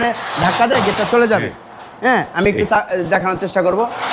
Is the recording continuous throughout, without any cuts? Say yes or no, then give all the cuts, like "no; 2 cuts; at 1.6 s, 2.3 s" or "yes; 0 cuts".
yes; 0 cuts